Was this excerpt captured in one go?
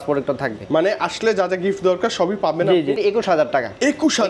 no; 1 cut; at 3.0 s

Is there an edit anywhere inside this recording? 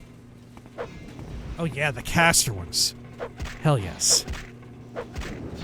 no; 0 cuts

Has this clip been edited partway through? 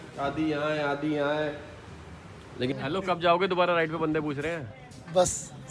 yes; 1 cut; at 2.7 s

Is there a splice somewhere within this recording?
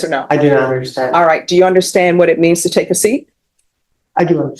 no; 0 cuts

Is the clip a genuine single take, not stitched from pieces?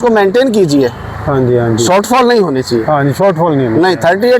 yes; 0 cuts

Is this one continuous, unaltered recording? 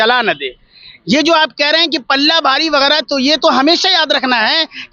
yes; 0 cuts

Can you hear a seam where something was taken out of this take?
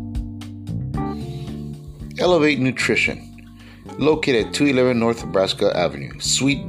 yes; 1 cut; at 1.1 s

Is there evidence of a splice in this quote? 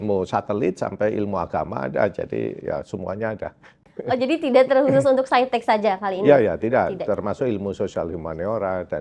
no; 0 cuts

